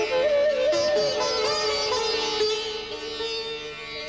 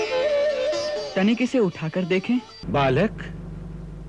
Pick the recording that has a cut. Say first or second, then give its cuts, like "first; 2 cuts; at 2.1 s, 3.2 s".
second; 2 cuts; at 1.0 s, 2.6 s